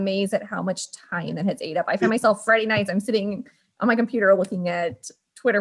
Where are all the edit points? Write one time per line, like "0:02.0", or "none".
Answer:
none